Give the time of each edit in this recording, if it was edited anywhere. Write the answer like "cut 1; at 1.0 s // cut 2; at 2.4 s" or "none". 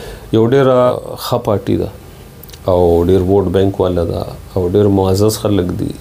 cut 1; at 0.9 s